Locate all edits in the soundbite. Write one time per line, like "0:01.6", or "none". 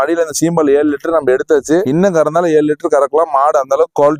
none